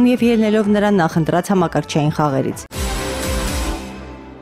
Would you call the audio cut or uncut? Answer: cut